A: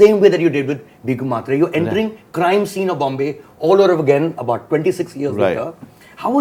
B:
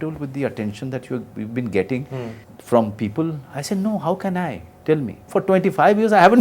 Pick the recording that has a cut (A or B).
B